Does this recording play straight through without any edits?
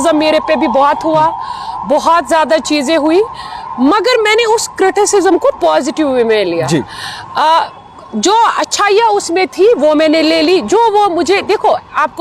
yes; 0 cuts

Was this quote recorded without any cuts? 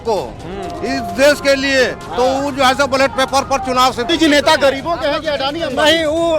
no; 1 cut; at 4.1 s

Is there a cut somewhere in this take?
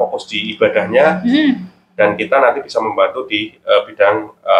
no; 0 cuts

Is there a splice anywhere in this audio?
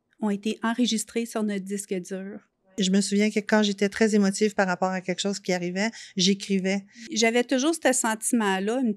yes; 2 cuts; at 2.7 s, 7.0 s

